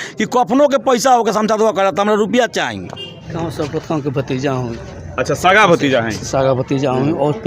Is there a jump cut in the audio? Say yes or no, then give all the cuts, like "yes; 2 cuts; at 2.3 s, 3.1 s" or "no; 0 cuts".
yes; 1 cut; at 3.3 s